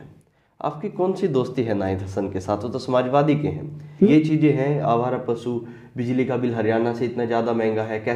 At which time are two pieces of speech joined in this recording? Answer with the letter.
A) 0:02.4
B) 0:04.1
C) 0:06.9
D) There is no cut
B